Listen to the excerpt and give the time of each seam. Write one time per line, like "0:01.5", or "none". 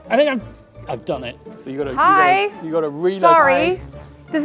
0:01.2